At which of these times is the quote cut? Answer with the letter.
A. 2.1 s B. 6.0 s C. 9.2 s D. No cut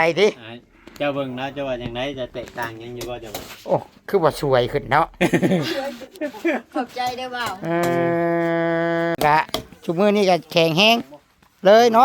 C